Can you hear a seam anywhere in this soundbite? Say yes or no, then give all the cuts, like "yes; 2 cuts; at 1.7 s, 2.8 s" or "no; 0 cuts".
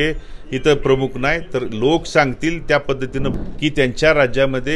yes; 1 cut; at 3.3 s